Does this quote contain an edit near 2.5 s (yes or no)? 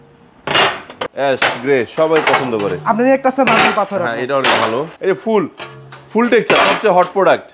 no